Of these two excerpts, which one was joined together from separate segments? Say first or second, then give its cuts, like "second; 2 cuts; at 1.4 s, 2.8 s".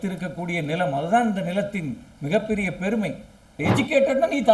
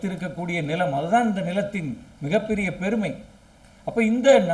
first; 1 cut; at 3.6 s